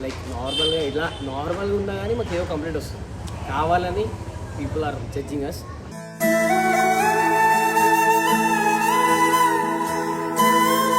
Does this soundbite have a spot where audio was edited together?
no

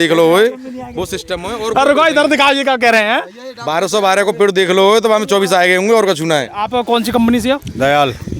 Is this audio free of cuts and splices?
no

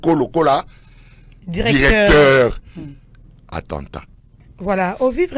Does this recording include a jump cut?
no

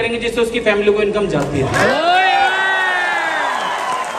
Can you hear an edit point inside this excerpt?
no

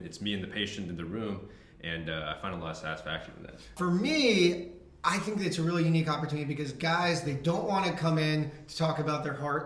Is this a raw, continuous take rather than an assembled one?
no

